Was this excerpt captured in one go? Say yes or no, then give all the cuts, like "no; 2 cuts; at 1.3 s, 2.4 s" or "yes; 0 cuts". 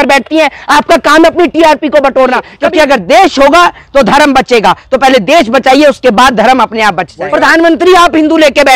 no; 2 cuts; at 2.5 s, 7.1 s